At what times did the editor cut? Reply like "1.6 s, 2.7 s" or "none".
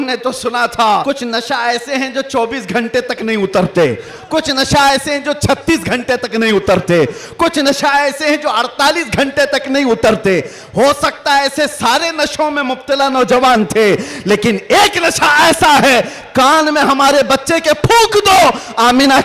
1.0 s